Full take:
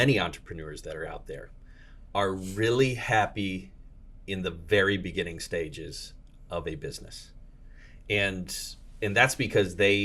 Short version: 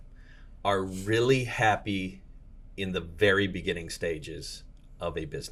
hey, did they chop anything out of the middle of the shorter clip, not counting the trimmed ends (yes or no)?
no